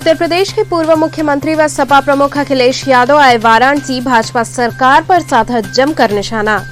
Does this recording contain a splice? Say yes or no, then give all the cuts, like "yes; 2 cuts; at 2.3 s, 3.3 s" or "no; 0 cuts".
no; 0 cuts